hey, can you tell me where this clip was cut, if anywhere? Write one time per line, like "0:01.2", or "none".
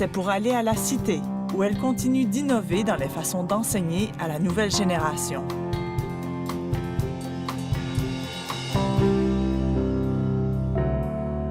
0:08.9